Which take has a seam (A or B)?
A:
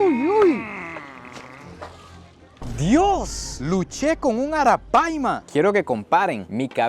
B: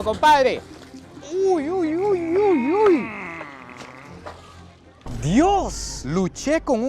A